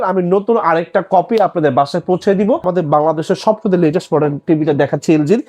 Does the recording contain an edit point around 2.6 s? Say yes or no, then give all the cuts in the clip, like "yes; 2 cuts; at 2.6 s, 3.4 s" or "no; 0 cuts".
yes; 1 cut; at 2.6 s